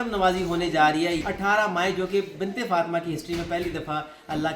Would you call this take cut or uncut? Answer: cut